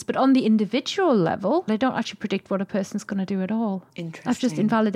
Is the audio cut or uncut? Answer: cut